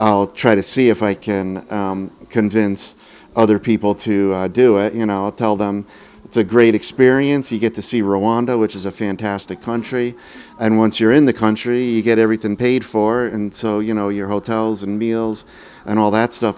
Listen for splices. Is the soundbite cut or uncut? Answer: uncut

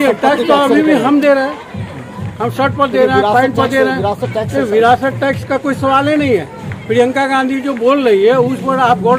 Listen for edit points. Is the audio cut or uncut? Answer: uncut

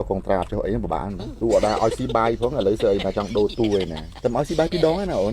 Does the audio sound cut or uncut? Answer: cut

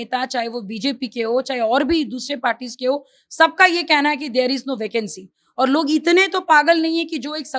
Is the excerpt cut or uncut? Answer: uncut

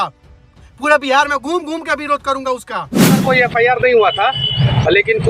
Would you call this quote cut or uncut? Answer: cut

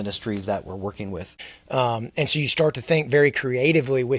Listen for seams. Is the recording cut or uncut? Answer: cut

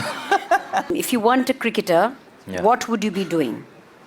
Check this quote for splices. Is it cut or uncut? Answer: cut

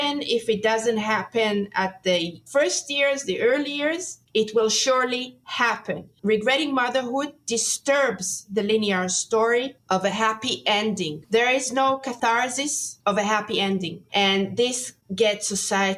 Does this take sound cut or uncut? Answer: cut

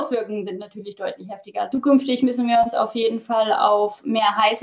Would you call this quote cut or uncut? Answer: cut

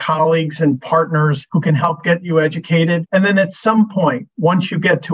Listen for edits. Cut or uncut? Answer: cut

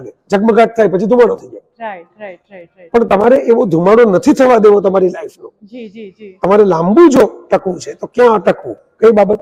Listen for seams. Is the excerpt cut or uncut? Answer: uncut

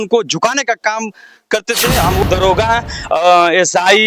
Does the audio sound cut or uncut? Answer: cut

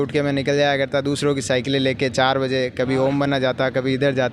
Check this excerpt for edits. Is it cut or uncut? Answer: uncut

